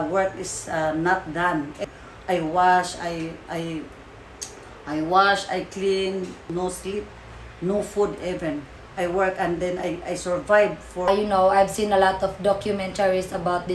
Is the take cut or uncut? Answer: cut